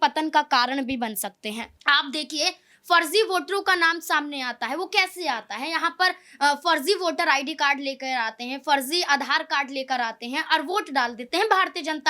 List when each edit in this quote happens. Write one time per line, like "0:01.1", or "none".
0:01.7